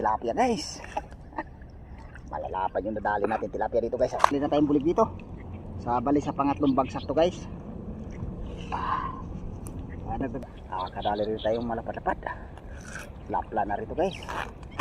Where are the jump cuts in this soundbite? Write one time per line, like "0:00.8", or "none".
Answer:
0:04.3
0:10.4